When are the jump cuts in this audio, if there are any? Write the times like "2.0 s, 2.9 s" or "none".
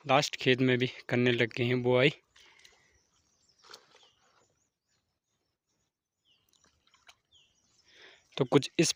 none